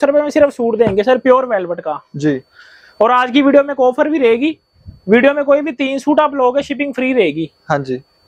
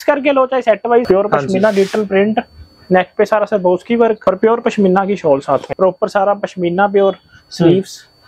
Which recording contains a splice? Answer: second; 3 cuts; at 1.0 s, 4.2 s, 5.7 s

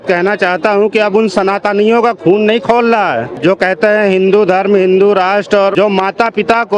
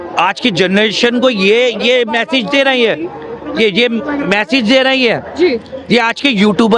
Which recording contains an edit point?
first; 2 cuts; at 3.3 s, 5.7 s

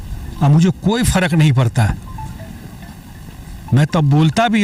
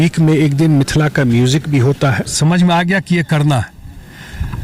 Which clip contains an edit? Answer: second; 1 cut; at 2.3 s

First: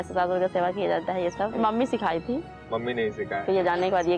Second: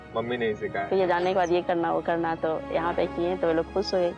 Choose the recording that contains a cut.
first; 1 cut; at 1.5 s

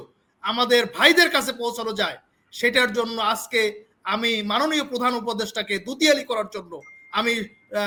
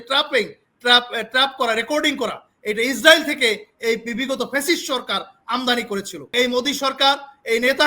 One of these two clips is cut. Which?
second; 1 cut; at 6.3 s

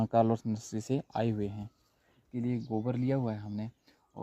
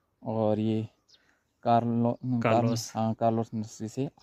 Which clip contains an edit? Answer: first; 1 cut; at 2.3 s

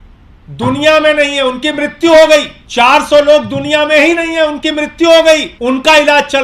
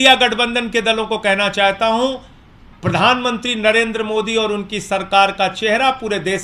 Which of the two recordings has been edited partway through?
first; 2 cuts; at 2.6 s, 5.5 s

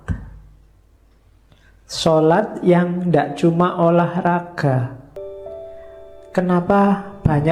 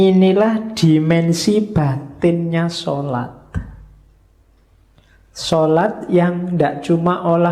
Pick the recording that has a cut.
first; 1 cut; at 5.2 s

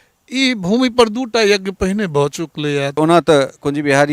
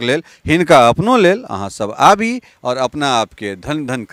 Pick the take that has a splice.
first; 1 cut; at 3.0 s

